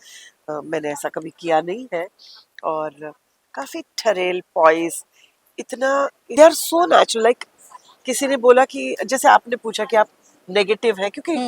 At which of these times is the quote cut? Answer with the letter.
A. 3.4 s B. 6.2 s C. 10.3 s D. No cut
B